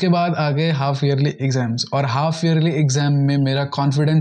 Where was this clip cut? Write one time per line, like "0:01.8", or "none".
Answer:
none